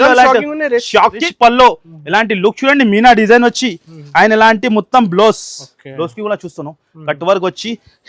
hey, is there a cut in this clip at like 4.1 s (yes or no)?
no